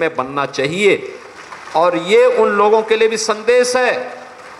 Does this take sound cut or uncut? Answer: uncut